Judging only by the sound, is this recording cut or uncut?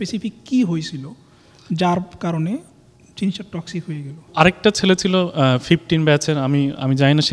cut